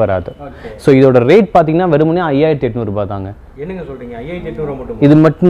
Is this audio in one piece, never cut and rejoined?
yes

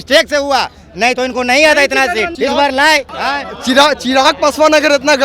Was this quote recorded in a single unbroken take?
no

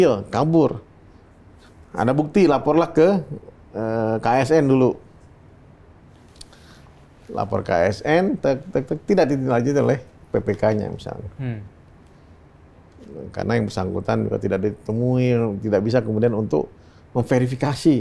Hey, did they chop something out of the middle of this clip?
no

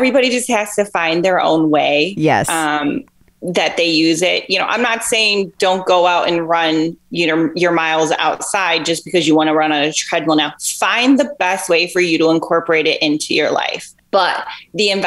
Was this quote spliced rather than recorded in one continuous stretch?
no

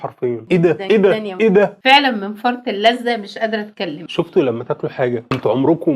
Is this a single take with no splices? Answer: no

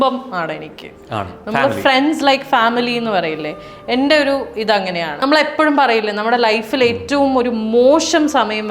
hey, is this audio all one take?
no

